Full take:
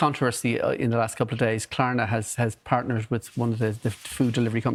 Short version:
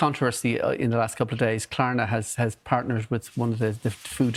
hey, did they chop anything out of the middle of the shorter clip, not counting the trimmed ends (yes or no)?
no